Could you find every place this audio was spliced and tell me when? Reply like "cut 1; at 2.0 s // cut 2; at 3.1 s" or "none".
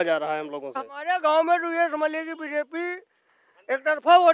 cut 1; at 1.0 s